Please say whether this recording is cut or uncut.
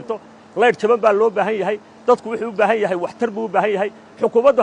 uncut